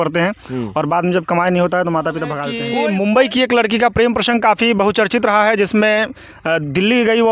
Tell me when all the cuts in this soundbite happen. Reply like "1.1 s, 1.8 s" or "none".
2.5 s